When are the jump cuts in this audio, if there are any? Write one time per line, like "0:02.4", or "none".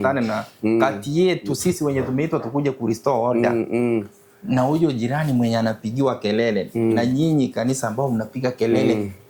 none